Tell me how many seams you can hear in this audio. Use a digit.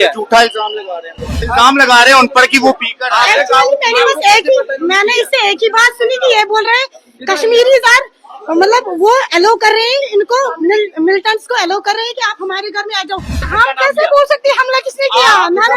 2